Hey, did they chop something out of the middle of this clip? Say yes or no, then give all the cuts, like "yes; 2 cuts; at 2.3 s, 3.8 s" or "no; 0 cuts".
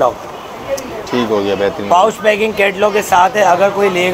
no; 0 cuts